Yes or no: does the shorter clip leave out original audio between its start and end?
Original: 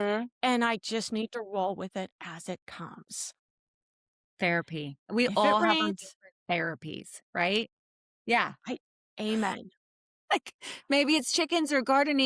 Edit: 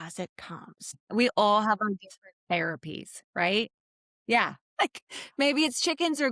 yes